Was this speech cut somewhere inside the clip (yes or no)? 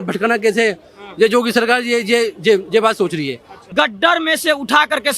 yes